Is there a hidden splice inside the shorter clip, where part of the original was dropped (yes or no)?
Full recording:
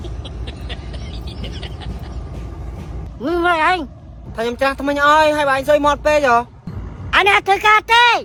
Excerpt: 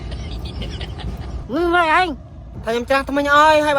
yes